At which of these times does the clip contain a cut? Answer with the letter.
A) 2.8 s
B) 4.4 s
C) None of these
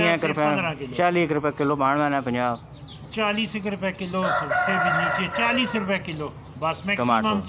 C